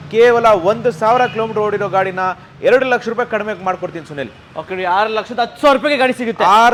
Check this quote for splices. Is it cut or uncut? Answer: uncut